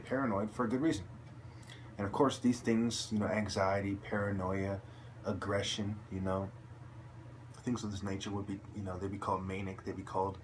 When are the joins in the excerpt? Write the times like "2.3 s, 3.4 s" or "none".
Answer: 5.0 s